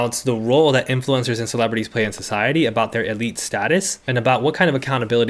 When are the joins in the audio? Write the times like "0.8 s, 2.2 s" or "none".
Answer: 4.0 s